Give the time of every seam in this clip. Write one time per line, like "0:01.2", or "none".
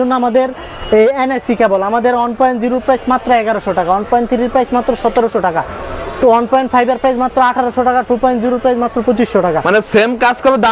none